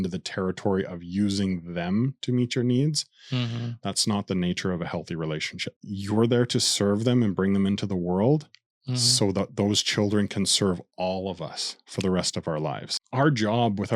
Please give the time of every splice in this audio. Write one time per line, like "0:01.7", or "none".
0:05.9
0:13.0